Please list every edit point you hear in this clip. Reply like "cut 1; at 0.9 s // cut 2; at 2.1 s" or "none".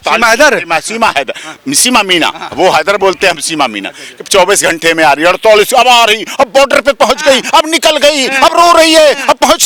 none